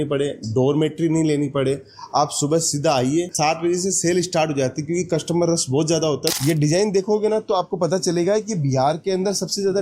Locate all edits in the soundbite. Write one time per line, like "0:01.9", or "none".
0:03.3
0:06.3